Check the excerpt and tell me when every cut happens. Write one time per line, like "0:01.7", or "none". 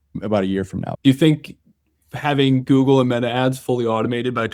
0:00.9